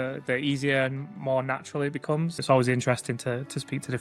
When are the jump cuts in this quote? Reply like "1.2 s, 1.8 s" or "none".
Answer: 2.4 s